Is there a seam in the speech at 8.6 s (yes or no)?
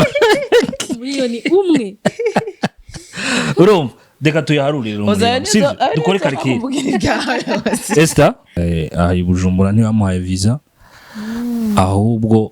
yes